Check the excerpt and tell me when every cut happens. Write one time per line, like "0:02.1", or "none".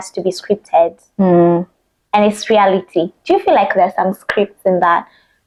none